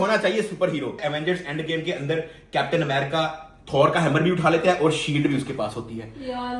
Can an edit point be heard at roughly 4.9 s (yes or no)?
no